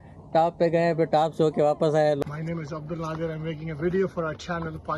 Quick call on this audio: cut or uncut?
cut